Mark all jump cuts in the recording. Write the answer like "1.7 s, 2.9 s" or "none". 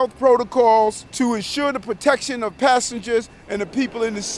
1.0 s